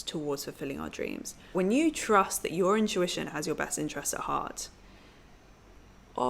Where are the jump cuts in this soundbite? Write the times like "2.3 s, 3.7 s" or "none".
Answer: 1.5 s

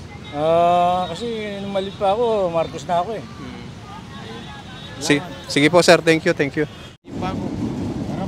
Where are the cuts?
6.9 s

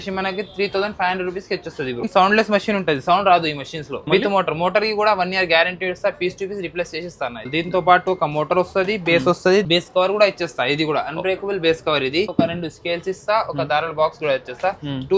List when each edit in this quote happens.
2.1 s, 4.1 s, 7.5 s, 9.6 s, 12.3 s

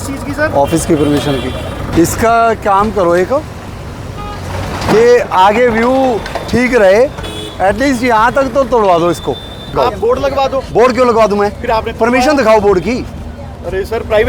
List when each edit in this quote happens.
1.9 s, 9.8 s

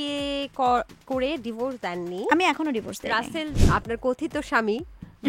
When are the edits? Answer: 3.6 s

